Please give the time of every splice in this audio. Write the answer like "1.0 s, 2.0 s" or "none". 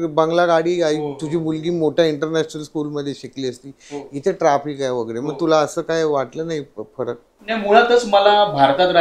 none